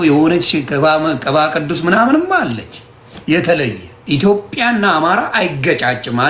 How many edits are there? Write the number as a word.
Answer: one